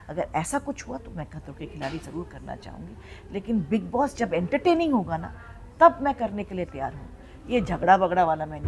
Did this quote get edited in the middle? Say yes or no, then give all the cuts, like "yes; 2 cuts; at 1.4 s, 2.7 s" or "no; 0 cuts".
no; 0 cuts